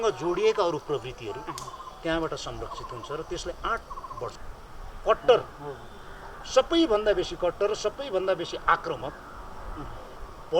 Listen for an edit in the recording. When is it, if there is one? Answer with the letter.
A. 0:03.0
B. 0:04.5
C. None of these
B